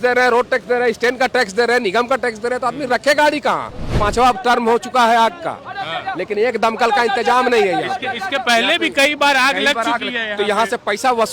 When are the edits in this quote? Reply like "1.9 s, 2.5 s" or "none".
3.9 s